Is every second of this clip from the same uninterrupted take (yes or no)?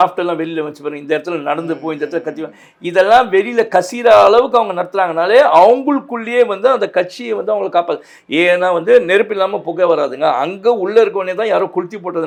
yes